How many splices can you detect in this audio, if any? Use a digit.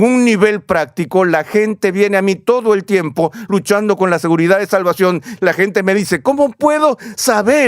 1